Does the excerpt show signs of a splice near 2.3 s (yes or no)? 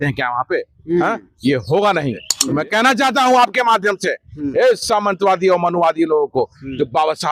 yes